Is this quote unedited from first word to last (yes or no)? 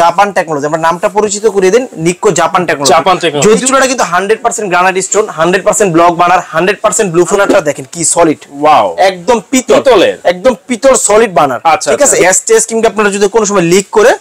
no